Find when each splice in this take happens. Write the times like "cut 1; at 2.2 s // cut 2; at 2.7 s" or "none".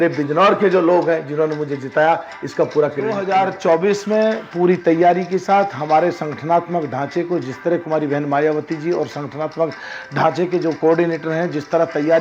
cut 1; at 3.2 s